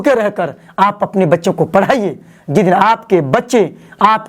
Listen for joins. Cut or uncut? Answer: uncut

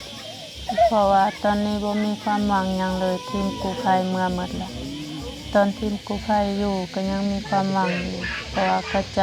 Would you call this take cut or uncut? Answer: uncut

